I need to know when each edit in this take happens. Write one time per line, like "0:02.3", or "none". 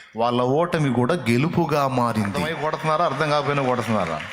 0:02.5